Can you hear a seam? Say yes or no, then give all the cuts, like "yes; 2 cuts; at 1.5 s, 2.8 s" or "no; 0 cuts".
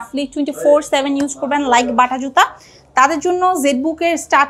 no; 0 cuts